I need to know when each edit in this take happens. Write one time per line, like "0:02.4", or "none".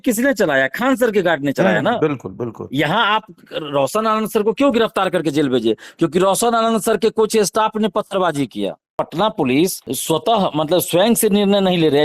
0:09.0
0:09.9